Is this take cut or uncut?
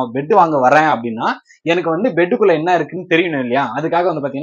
uncut